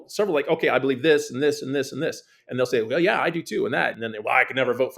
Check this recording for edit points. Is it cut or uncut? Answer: cut